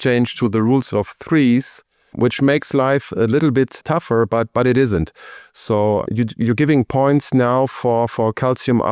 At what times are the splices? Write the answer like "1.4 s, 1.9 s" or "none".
none